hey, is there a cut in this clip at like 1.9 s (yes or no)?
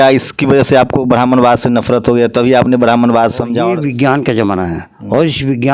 no